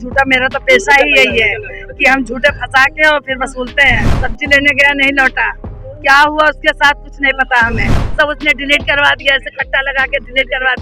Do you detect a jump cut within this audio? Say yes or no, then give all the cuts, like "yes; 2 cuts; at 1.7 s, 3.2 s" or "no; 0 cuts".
yes; 2 cuts; at 4.1 s, 8.0 s